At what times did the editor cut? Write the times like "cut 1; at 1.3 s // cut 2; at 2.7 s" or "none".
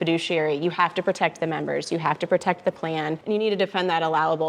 cut 1; at 3.2 s